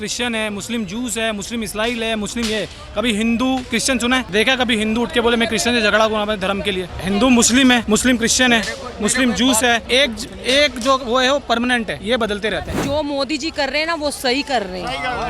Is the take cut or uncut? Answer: cut